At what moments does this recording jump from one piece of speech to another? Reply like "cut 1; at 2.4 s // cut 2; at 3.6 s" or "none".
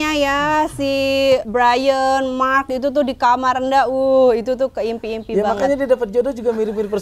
cut 1; at 1.5 s